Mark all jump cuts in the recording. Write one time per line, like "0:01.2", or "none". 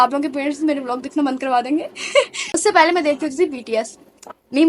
0:02.6